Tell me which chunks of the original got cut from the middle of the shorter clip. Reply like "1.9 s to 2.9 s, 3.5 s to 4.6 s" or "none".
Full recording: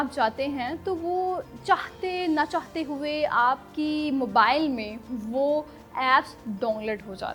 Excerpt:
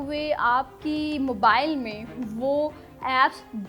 none